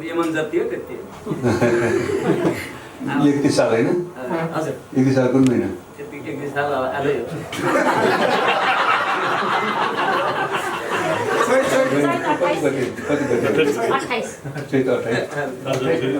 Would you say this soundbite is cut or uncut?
uncut